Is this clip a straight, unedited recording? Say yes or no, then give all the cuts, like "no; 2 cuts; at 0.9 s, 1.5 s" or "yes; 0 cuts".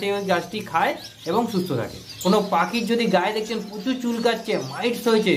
no; 1 cut; at 2.0 s